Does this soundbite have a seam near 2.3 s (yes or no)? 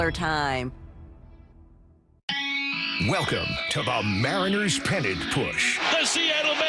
yes